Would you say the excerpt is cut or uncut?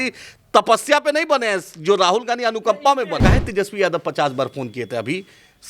cut